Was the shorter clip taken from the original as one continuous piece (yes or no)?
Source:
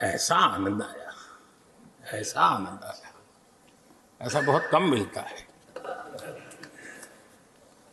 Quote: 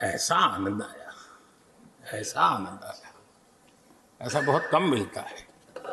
yes